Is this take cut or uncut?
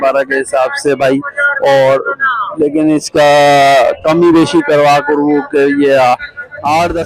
uncut